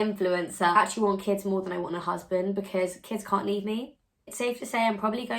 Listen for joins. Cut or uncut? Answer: cut